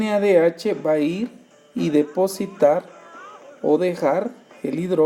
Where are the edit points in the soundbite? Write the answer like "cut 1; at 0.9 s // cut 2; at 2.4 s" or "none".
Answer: none